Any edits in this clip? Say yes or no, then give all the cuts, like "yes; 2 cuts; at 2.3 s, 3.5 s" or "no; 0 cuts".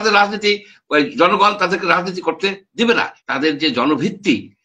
yes; 1 cut; at 3.2 s